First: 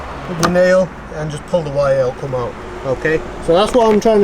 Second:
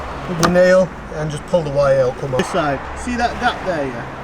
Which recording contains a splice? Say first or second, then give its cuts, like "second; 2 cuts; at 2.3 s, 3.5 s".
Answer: second; 1 cut; at 2.4 s